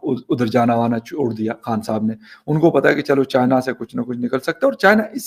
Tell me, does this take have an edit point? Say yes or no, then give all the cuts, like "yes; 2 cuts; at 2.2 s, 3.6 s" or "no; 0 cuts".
no; 0 cuts